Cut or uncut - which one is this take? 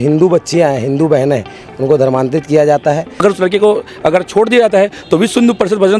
cut